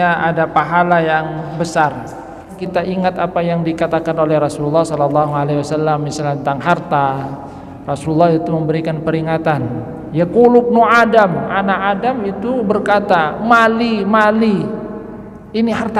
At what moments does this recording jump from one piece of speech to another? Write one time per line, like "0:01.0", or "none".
0:02.6